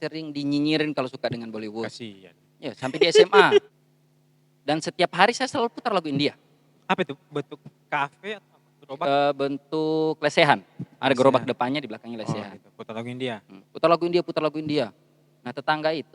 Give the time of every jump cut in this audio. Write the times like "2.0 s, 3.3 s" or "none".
3.7 s